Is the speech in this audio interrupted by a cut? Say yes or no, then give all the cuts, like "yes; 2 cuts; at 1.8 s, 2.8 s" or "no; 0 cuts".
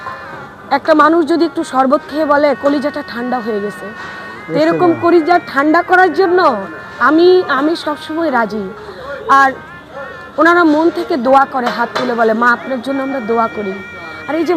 no; 0 cuts